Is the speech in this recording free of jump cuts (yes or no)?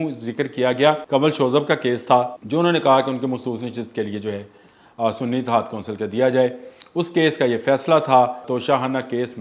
no